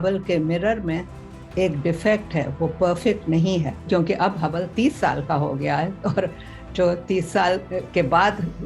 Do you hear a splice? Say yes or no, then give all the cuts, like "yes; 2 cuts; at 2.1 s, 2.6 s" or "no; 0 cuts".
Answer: no; 0 cuts